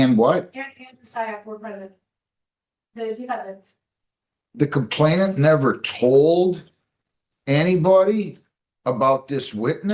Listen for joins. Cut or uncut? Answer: uncut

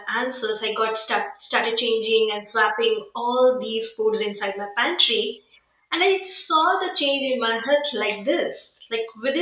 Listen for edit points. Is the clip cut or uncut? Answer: uncut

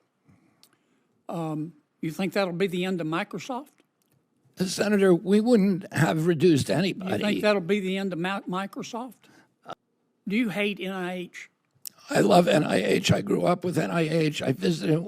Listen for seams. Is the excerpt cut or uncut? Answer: cut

